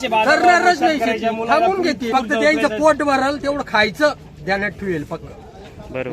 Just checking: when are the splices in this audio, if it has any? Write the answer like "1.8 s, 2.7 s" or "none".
2.1 s